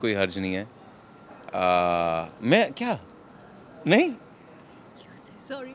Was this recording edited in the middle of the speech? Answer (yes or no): no